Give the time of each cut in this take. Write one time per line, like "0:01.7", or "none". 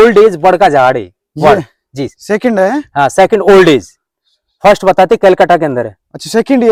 none

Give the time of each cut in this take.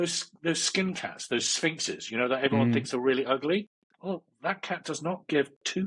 0:03.8

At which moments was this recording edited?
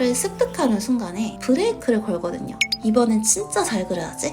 0:01.3
0:02.7

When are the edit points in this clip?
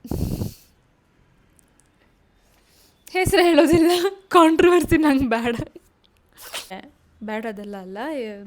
0:06.7

